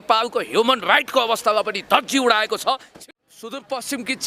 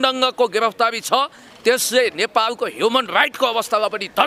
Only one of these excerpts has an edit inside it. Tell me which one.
first; 1 cut; at 2.9 s

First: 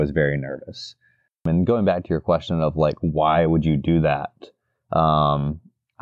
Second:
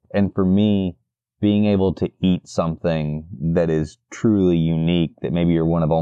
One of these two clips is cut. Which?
first; 1 cut; at 1.4 s

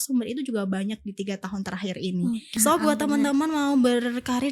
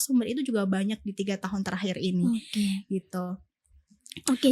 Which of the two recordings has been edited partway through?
first; 1 cut; at 2.5 s

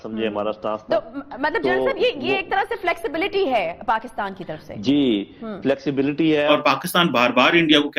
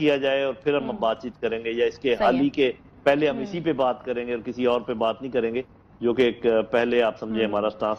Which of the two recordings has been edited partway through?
first; 1 cut; at 6.5 s

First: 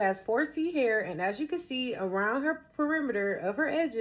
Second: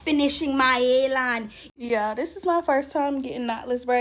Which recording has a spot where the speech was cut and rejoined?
second; 1 cut; at 1.6 s

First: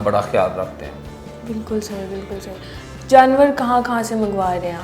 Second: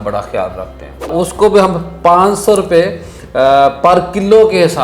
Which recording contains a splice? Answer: second; 1 cut; at 1.1 s

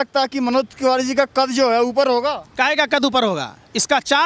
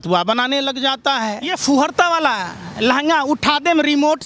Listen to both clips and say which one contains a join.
second; 1 cut; at 1.6 s

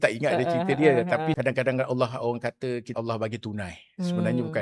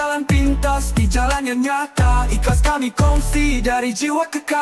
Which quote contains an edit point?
first; 2 cuts; at 1.4 s, 2.9 s

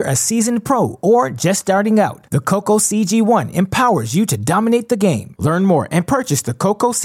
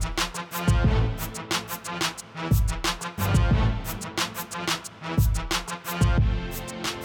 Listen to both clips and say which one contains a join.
second; 2 cuts; at 1.2 s, 5.8 s

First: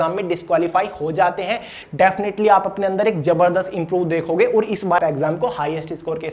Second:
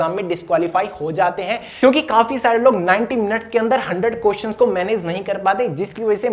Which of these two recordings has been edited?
first; 2 cuts; at 1.7 s, 5.0 s

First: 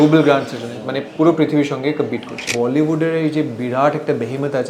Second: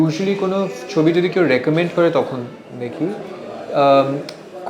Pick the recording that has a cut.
first; 1 cut; at 2.4 s

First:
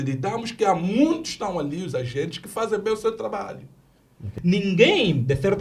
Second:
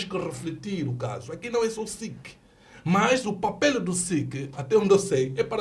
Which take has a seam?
first; 1 cut; at 4.2 s

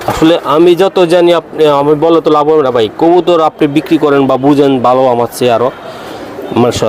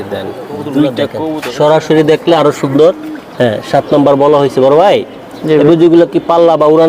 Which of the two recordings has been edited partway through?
second; 1 cut; at 1.4 s

